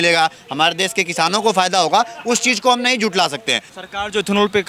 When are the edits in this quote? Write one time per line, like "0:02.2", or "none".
0:03.7